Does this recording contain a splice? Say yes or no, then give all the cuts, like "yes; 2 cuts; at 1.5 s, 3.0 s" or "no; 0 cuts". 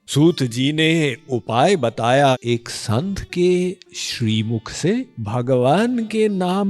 yes; 2 cuts; at 2.4 s, 5.2 s